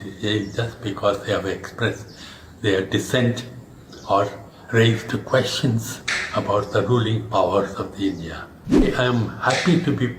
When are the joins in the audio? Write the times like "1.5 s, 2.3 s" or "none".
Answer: 8.9 s